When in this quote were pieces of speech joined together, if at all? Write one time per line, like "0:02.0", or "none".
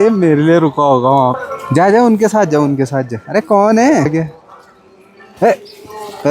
0:01.5
0:04.1

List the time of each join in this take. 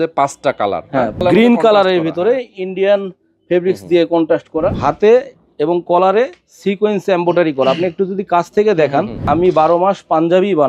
0:01.2
0:04.8
0:09.2

